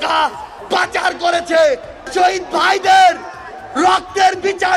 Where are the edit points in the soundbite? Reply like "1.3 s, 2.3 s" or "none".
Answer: 2.1 s

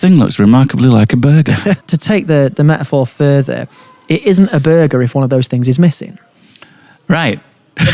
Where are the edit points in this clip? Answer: 1.8 s

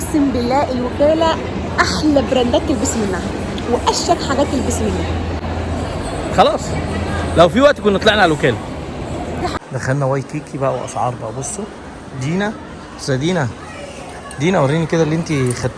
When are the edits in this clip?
none

